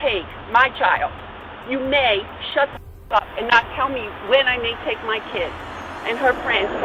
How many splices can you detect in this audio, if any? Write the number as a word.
zero